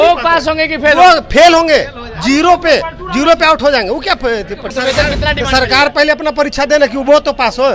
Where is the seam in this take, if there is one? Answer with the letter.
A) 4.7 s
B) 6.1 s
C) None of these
A